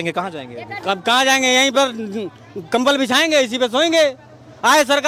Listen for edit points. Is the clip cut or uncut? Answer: uncut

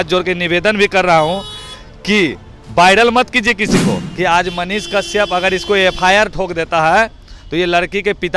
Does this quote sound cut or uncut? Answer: cut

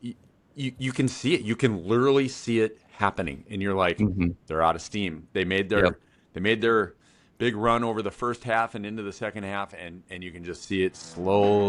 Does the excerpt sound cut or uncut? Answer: uncut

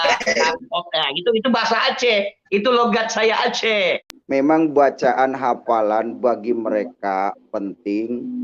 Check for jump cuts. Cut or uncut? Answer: cut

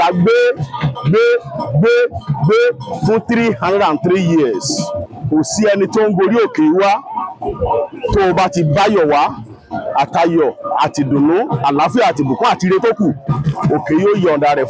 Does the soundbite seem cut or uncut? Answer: cut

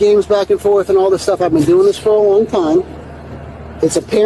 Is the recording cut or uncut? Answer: uncut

